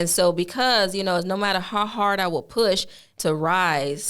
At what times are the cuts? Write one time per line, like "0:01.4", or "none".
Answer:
0:03.1